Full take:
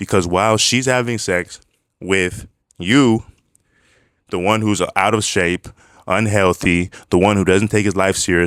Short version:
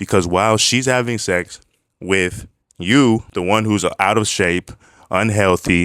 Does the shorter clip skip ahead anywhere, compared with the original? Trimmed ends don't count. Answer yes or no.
yes